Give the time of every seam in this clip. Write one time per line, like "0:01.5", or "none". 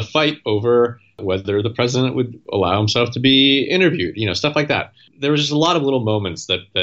0:01.2
0:02.4
0:05.0